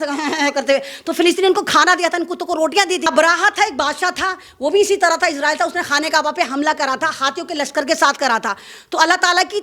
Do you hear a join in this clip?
yes; 1 cut; at 3.0 s

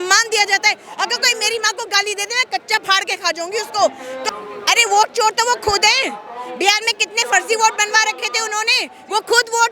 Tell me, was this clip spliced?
yes; 1 cut; at 4.3 s

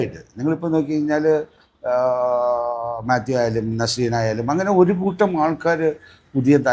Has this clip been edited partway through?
no; 0 cuts

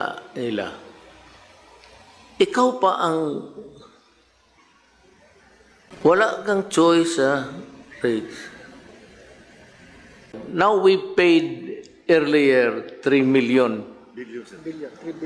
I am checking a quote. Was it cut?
yes; 2 cuts; at 5.9 s, 10.4 s

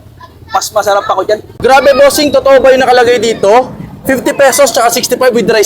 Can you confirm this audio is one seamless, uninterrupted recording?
no; 1 cut; at 1.5 s

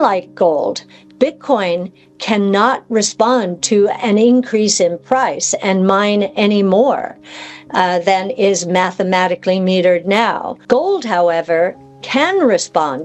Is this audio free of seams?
no; 1 cut; at 10.5 s

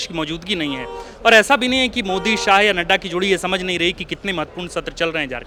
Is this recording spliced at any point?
no; 0 cuts

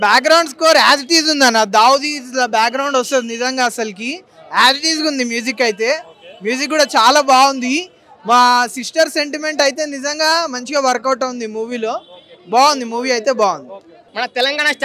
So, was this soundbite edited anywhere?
no; 0 cuts

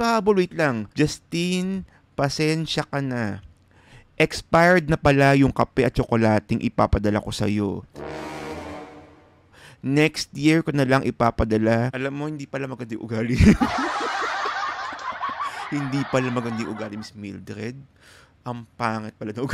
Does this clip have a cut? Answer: no; 0 cuts

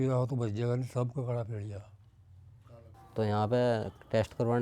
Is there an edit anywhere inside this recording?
yes; 1 cut; at 3.0 s

